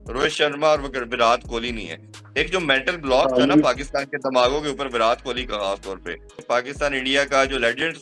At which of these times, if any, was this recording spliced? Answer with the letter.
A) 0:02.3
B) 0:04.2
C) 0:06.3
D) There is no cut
C